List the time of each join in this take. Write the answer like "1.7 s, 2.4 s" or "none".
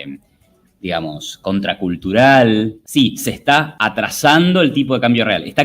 2.8 s, 3.7 s

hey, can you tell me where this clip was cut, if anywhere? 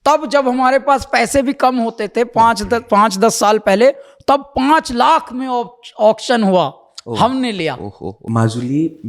8.1 s

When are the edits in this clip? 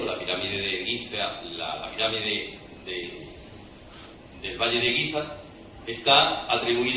none

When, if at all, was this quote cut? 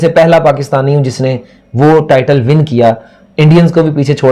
none

